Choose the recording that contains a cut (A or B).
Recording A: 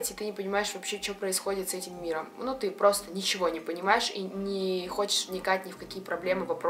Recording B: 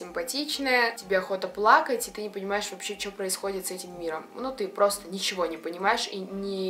B